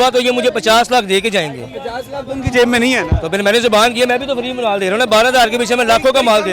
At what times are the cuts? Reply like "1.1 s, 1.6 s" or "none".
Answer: none